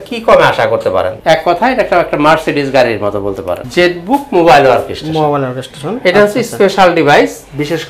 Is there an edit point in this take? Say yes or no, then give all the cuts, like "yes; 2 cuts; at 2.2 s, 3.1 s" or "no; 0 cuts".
yes; 2 cuts; at 1.2 s, 3.5 s